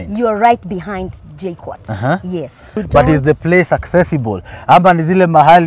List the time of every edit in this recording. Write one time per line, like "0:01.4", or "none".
0:02.8